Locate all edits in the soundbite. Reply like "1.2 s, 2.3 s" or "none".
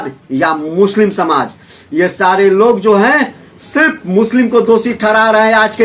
none